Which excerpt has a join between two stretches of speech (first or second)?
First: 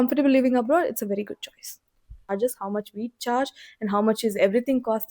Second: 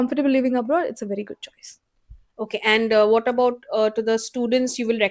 first